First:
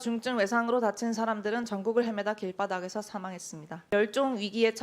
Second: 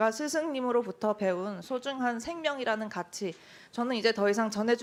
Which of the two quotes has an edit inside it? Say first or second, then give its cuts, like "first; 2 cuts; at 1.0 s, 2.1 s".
first; 1 cut; at 3.9 s